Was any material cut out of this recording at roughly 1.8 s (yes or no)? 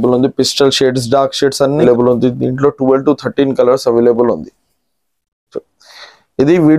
yes